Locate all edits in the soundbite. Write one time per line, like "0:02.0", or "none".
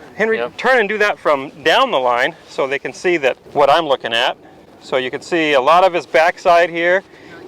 0:03.4